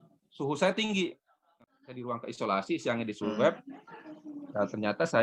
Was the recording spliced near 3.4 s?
no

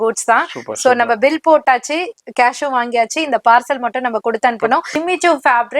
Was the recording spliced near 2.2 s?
no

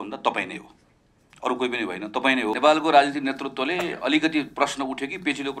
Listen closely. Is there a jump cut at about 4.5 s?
no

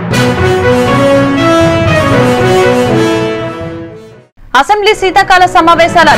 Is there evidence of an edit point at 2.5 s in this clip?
yes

